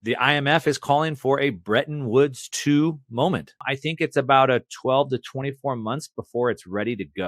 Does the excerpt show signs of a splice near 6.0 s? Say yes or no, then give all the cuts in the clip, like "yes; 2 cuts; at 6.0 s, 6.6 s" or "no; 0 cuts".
no; 1 cut; at 3.6 s